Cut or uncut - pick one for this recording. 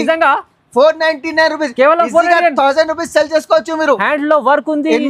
uncut